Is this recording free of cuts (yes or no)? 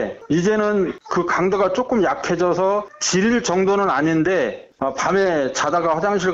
no